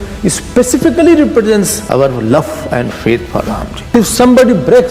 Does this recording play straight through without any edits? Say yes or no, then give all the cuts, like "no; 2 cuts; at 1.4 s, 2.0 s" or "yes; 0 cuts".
no; 2 cuts; at 1.8 s, 3.7 s